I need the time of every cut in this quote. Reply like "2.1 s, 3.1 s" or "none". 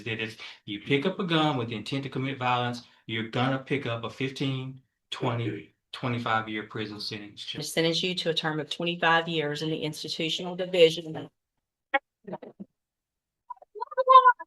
7.7 s